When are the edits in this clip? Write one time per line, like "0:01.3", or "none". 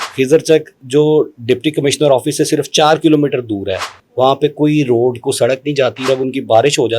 0:06.0